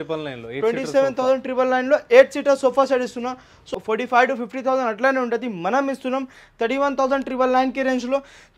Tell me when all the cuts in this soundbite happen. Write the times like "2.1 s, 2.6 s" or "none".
3.7 s